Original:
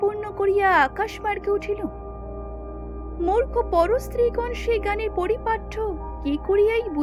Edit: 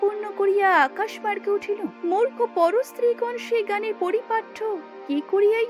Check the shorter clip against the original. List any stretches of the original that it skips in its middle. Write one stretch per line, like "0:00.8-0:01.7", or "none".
0:01.9-0:03.1